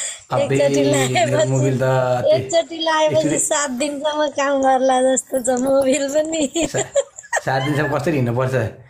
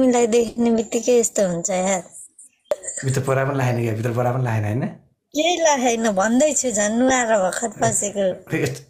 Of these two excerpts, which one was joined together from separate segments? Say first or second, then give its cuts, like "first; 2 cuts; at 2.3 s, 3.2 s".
second; 1 cut; at 2.7 s